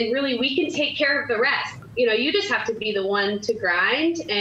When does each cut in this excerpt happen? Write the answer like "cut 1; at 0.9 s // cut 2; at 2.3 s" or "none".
cut 1; at 1.7 s